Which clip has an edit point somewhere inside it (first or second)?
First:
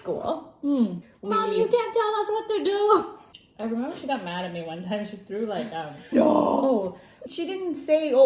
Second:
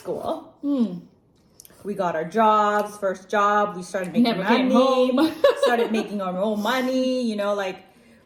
first